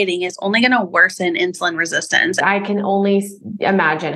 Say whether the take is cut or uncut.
cut